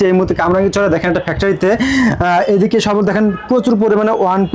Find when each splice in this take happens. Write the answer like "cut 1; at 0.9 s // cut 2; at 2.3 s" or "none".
none